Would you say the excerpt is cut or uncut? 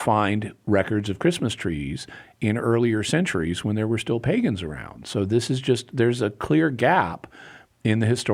uncut